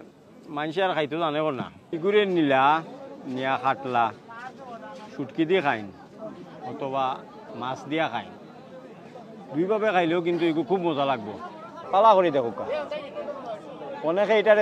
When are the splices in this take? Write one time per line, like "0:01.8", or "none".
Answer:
0:01.8
0:11.8

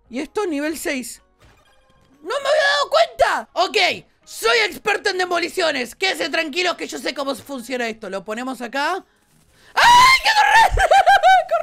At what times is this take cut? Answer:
0:03.4

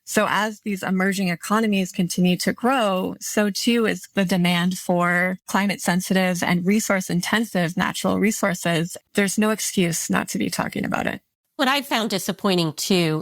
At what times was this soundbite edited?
0:09.0
0:11.4

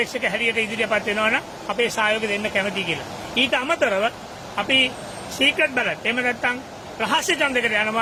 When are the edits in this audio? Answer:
none

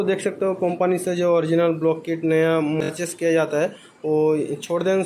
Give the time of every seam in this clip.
0:02.6

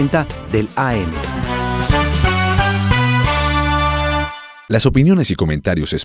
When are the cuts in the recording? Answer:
none

